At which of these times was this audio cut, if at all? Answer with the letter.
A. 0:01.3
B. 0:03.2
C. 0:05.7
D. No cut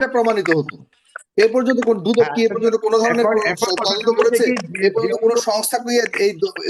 D